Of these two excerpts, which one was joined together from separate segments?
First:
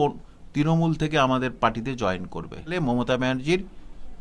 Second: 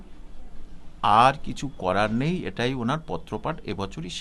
first; 1 cut; at 2.7 s

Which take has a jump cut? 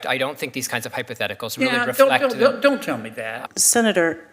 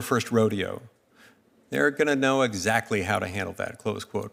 first; 1 cut; at 3.4 s

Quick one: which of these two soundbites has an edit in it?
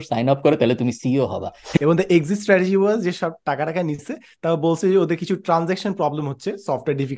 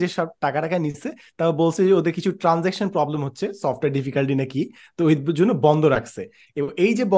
first; 1 cut; at 1.8 s

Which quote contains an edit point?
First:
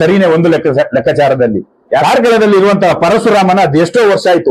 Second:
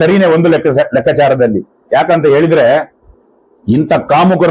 first; 1 cut; at 2.0 s

